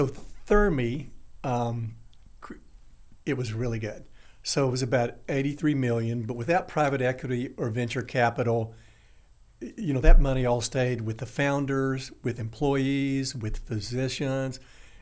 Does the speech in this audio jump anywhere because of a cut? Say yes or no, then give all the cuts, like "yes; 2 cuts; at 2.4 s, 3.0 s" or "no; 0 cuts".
no; 0 cuts